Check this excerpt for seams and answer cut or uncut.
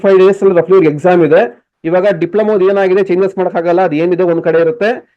cut